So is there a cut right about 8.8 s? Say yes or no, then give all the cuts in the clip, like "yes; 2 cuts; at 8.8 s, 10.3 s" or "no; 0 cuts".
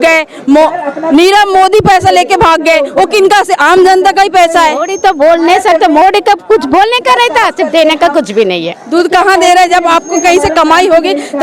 yes; 2 cuts; at 4.9 s, 8.8 s